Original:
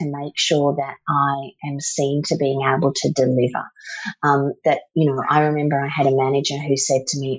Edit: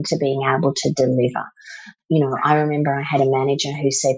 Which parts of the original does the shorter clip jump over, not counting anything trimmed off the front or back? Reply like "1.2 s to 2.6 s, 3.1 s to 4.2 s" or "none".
4.2 s to 4.8 s